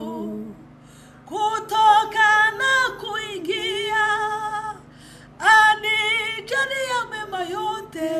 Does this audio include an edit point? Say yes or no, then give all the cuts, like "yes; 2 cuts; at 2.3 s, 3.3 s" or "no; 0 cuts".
no; 0 cuts